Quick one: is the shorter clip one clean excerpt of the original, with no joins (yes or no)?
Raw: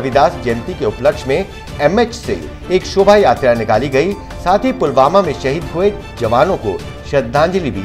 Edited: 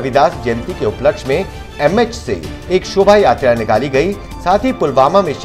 yes